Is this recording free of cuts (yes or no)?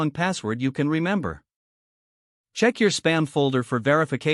yes